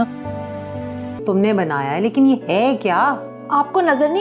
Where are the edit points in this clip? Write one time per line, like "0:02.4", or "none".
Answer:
0:01.2